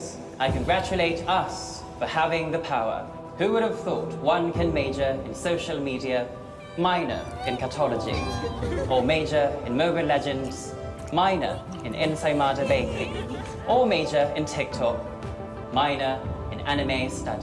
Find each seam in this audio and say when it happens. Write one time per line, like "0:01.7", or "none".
0:02.4

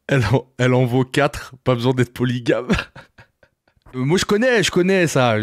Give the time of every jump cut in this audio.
0:03.9

